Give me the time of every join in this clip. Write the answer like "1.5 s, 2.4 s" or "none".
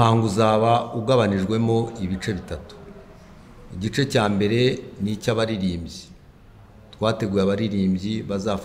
none